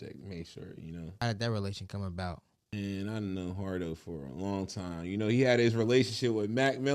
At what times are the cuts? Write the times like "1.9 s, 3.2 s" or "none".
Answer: 1.2 s, 2.7 s